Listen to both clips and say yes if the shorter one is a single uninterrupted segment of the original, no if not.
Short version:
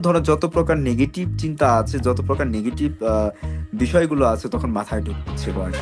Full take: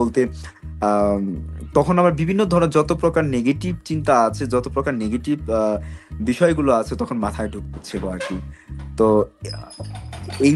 yes